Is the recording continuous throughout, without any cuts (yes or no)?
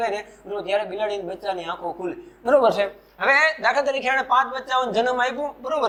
yes